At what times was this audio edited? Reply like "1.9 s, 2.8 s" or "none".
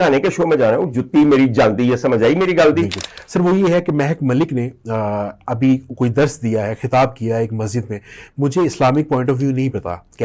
3.1 s